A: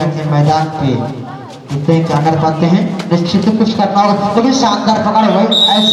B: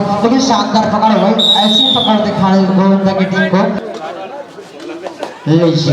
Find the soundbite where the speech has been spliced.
B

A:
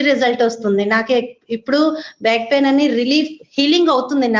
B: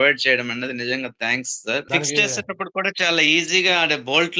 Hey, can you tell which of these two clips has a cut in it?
B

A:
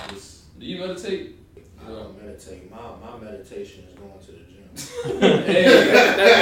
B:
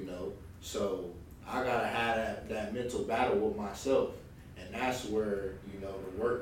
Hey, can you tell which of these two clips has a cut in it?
A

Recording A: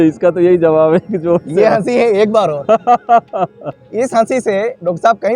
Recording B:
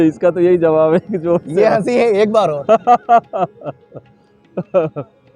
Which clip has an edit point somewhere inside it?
A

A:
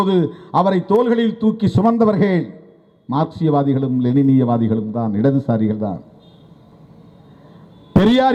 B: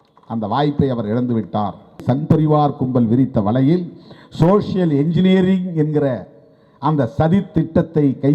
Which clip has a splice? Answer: B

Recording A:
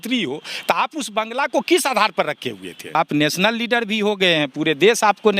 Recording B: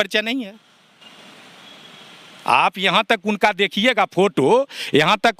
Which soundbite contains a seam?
A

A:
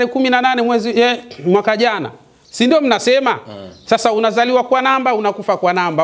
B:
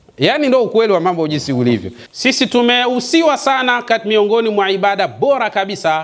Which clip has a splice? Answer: B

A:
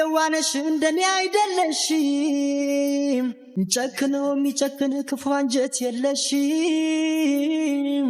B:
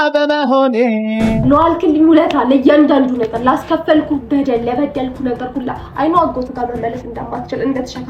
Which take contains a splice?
B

